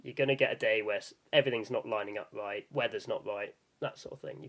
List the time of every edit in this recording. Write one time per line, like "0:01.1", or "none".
0:02.7